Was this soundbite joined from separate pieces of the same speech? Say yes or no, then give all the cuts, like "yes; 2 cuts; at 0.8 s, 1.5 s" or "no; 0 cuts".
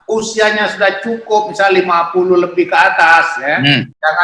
no; 0 cuts